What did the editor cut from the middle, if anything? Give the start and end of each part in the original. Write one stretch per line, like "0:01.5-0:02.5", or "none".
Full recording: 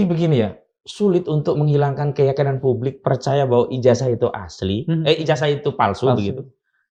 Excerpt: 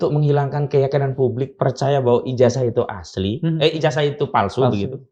none